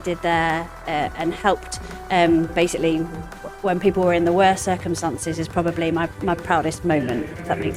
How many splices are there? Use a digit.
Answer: 0